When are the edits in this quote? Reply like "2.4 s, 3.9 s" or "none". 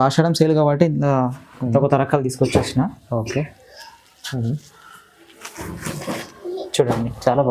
none